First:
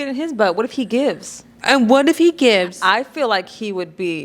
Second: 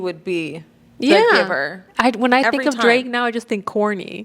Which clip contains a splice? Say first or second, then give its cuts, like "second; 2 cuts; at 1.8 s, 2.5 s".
second; 1 cut; at 1.8 s